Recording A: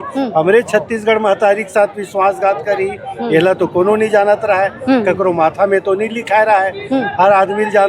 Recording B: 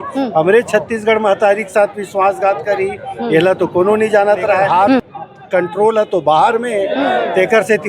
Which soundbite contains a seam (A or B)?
B